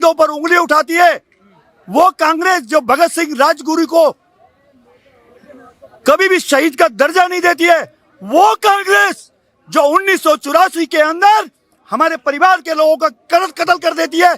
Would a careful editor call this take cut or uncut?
uncut